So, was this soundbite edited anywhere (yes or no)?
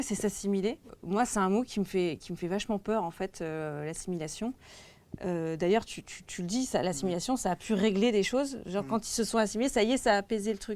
yes